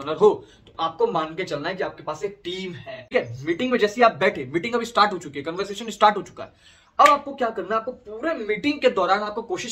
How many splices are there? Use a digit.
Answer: 1